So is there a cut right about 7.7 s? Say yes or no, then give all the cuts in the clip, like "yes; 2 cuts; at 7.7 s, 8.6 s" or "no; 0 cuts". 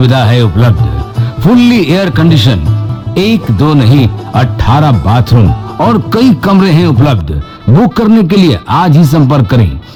no; 0 cuts